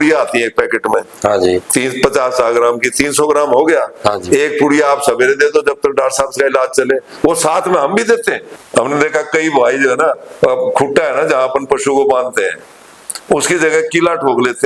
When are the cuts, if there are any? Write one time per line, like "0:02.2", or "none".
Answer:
0:08.5